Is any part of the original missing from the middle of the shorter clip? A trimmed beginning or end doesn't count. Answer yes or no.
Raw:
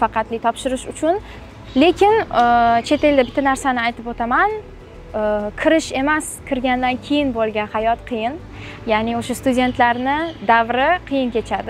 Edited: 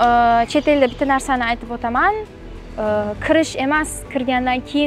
no